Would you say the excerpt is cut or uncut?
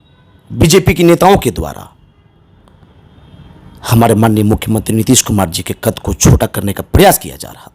uncut